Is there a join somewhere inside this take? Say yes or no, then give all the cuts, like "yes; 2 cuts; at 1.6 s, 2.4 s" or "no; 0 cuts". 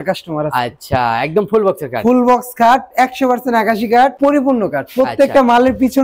no; 0 cuts